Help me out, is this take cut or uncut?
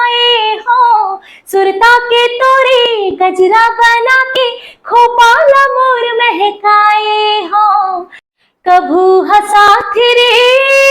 cut